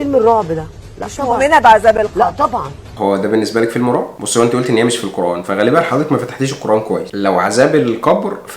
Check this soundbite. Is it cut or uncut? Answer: cut